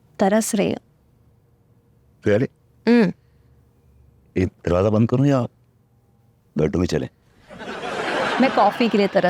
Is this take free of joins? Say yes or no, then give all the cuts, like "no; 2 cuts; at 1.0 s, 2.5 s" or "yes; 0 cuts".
yes; 0 cuts